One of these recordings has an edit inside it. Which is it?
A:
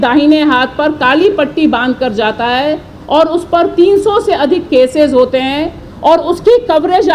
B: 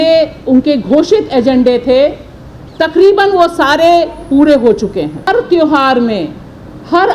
B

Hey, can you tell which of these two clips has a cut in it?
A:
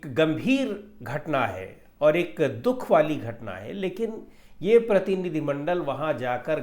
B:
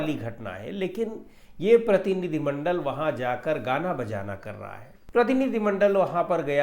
B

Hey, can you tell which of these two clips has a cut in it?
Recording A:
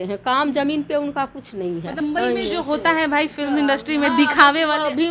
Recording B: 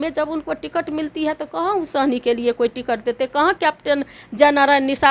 A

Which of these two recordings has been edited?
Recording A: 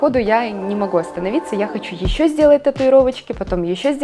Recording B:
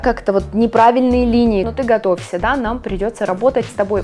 B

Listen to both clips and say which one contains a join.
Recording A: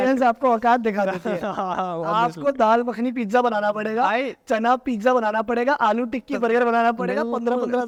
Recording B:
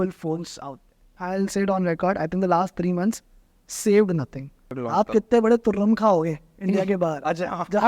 B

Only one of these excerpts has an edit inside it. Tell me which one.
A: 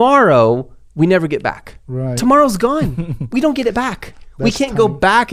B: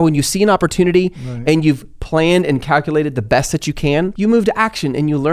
B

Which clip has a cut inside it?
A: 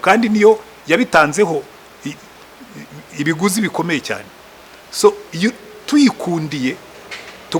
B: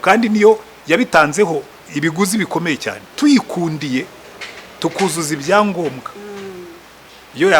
B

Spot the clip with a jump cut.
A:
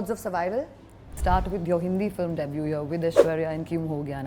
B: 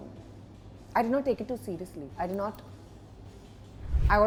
A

